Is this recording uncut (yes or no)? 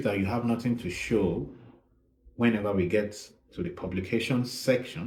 yes